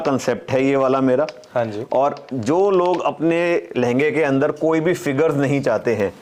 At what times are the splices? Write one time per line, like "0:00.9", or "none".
none